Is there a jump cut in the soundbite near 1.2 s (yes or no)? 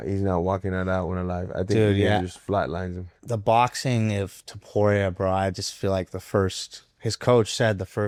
no